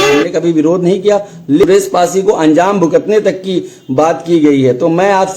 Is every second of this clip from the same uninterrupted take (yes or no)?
no